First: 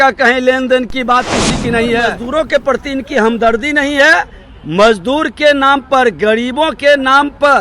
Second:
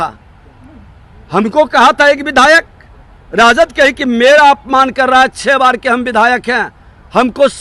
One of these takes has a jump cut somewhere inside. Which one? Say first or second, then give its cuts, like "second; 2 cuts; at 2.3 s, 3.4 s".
first; 1 cut; at 2.2 s